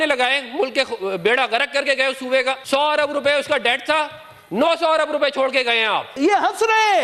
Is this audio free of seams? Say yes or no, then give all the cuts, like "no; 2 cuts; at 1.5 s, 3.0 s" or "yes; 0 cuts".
no; 2 cuts; at 2.6 s, 6.1 s